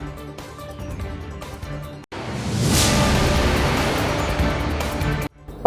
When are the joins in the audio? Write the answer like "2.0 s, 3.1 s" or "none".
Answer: none

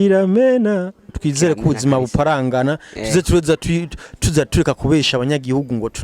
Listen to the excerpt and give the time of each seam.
1.1 s

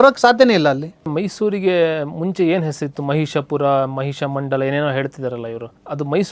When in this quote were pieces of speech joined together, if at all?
1.1 s

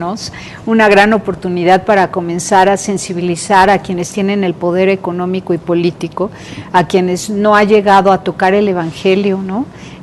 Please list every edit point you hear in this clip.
none

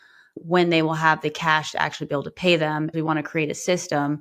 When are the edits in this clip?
2.9 s

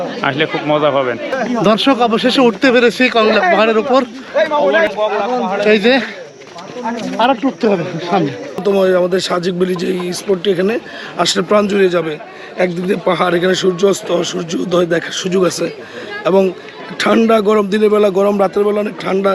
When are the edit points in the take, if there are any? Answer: 1.4 s, 8.6 s

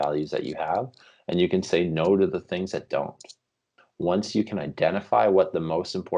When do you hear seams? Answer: 3.8 s

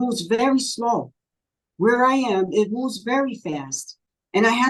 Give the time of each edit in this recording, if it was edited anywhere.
none

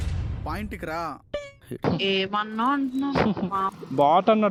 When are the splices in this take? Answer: none

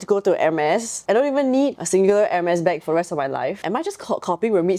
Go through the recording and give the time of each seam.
0.9 s, 1.8 s, 3.6 s

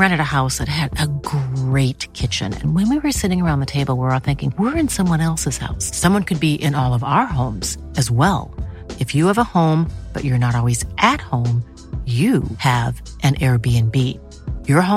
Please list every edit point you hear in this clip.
none

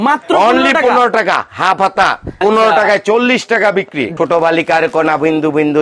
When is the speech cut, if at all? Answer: 2.4 s, 4.1 s

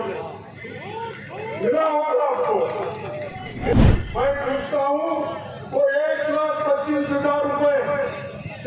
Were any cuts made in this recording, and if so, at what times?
3.7 s

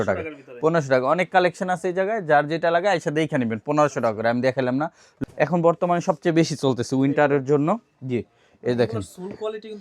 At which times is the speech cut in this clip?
5.1 s

